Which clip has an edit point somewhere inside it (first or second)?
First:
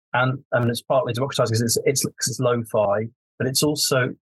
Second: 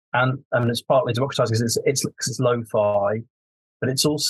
first